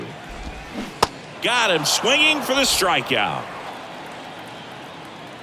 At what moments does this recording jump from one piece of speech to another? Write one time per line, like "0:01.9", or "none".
0:03.6

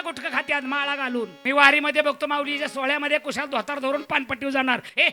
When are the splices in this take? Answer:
0:01.4

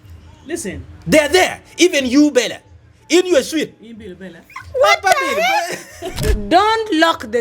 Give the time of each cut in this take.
0:06.3

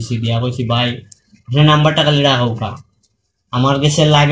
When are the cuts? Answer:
none

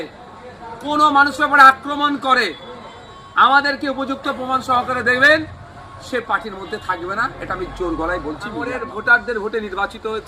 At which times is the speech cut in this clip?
0:08.9

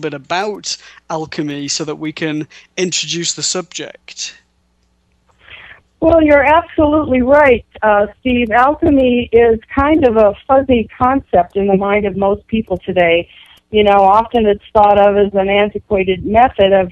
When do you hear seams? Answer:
0:03.3

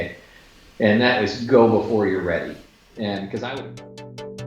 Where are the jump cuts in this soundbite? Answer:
0:03.6

